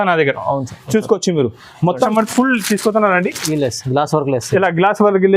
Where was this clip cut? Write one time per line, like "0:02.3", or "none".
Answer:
0:02.1